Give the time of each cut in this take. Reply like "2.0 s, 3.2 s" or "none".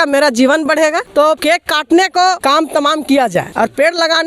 1.3 s, 2.4 s, 3.5 s